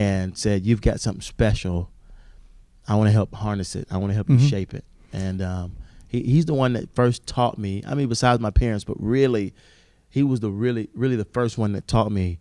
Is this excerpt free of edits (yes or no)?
yes